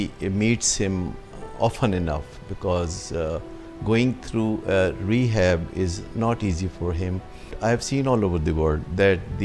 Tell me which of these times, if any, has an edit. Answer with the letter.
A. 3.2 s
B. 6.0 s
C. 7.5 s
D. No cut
C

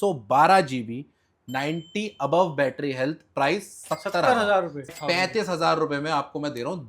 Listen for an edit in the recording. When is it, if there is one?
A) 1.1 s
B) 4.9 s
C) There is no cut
B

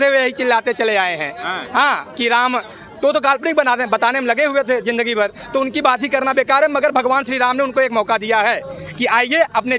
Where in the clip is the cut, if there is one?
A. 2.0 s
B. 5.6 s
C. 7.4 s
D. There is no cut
D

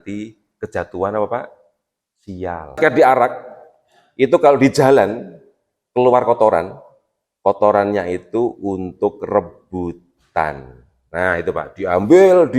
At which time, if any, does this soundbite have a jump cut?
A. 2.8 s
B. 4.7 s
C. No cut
A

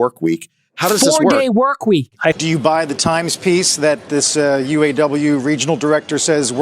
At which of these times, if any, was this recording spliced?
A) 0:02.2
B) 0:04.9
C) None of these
A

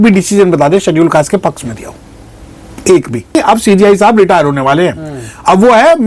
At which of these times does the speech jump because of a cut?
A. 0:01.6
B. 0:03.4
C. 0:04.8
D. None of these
B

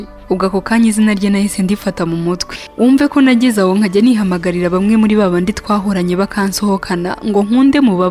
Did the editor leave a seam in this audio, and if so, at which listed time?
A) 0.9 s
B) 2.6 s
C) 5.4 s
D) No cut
B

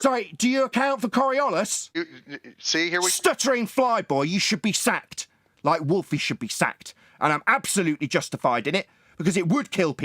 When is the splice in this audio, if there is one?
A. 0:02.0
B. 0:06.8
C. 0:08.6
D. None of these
A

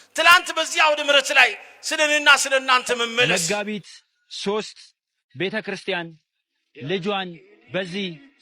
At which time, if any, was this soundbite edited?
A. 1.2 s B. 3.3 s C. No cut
B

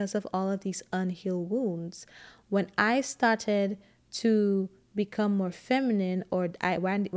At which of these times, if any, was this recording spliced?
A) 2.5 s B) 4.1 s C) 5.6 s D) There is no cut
D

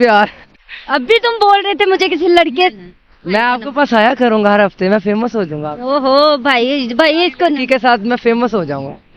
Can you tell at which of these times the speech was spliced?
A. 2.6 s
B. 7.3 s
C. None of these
C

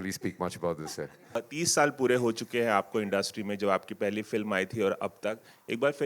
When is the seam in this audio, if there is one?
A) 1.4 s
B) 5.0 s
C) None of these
A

